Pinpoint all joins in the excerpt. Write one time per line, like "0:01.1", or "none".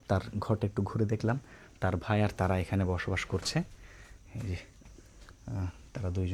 none

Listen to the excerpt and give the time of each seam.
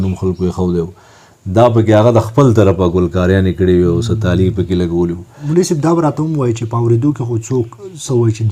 0:05.3

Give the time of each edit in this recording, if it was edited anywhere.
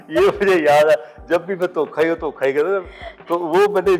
none

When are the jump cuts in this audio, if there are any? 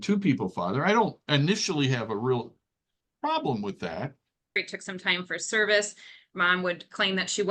0:04.6

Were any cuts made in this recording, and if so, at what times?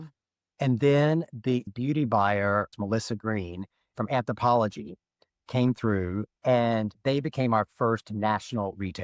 0:01.7
0:02.7
0:06.3

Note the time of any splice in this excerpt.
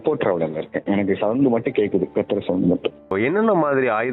0:03.1

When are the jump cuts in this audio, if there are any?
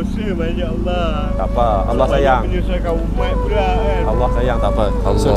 none

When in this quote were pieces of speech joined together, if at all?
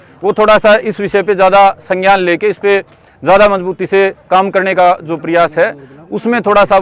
none

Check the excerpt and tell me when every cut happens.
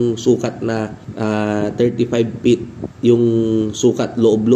none

